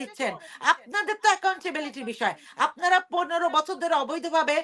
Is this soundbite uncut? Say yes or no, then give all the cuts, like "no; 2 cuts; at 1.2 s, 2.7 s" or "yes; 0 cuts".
yes; 0 cuts